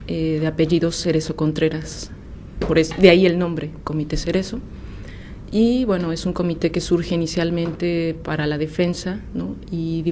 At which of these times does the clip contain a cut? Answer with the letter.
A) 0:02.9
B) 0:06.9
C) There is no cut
A